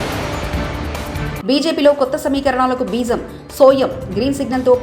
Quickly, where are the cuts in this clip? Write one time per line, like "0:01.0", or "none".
none